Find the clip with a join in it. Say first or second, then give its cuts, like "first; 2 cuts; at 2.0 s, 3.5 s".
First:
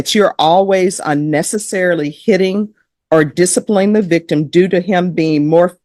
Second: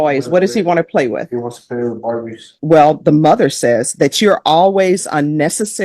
second; 1 cut; at 2.5 s